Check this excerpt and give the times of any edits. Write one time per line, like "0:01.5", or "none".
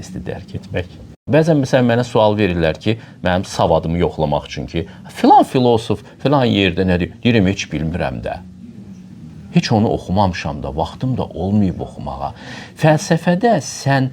0:01.2